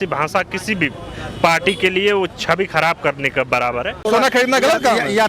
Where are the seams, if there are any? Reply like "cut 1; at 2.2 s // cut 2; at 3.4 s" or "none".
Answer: cut 1; at 4.0 s